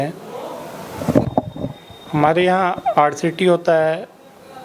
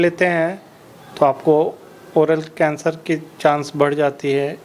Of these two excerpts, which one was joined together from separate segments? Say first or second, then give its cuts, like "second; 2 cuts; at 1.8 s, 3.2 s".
first; 1 cut; at 1.3 s